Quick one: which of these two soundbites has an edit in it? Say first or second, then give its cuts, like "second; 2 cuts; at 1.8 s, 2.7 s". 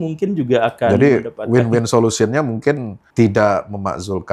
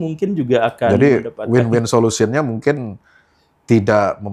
first; 1 cut; at 3.0 s